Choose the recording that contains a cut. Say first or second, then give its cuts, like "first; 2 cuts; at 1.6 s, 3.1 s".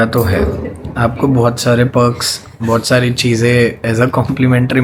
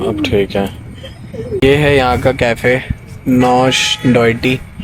second; 1 cut; at 1.6 s